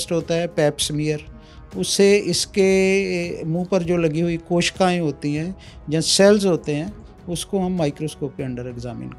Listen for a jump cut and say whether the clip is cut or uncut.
uncut